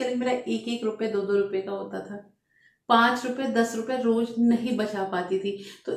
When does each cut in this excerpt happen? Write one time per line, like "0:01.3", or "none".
none

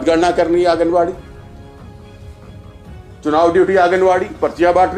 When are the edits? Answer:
none

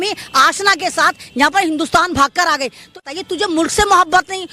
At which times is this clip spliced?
0:03.0

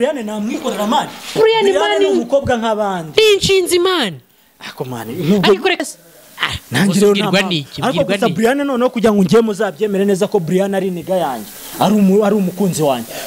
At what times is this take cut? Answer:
0:05.8

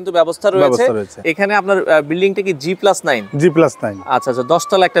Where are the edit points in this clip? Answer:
0:01.1

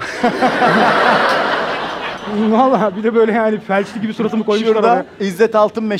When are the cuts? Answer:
none

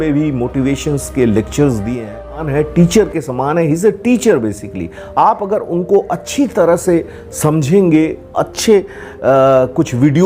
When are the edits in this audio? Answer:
0:02.5

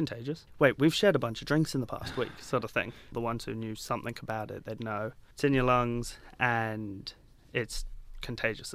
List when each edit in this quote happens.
0:03.1
0:05.2

